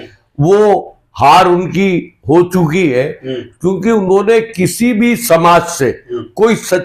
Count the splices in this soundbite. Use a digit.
0